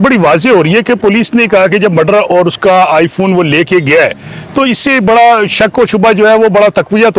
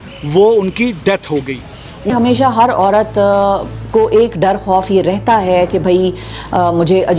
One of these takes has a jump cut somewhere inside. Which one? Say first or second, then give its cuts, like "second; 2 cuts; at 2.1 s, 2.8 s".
second; 1 cut; at 2.1 s